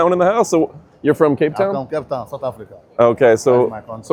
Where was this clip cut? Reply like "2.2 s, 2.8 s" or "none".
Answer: none